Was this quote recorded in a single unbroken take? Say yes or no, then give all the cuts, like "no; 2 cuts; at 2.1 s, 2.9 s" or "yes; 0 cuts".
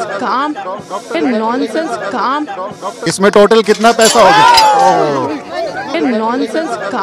no; 2 cuts; at 1.1 s, 3.0 s